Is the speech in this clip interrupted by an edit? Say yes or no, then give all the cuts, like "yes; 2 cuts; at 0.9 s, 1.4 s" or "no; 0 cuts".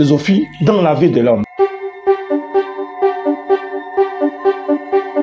no; 0 cuts